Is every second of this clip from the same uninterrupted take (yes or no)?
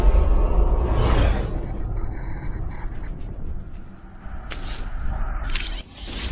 yes